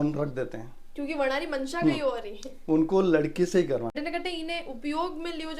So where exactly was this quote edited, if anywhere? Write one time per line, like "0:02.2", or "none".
0:03.9